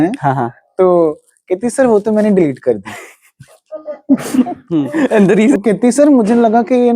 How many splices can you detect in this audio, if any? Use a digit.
1